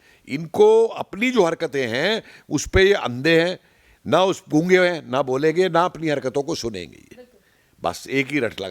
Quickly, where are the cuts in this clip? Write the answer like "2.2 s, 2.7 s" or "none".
none